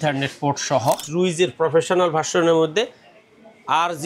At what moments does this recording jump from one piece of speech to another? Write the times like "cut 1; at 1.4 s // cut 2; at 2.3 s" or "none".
cut 1; at 1.1 s